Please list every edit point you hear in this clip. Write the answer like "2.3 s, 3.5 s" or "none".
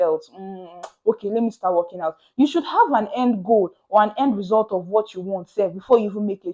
none